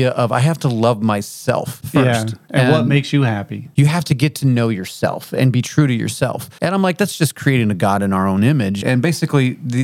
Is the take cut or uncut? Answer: cut